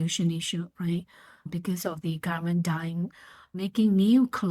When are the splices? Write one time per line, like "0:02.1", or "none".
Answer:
0:03.5